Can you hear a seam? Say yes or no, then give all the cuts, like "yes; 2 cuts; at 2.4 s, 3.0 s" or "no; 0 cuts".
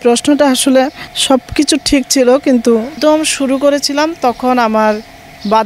yes; 2 cuts; at 1.1 s, 2.9 s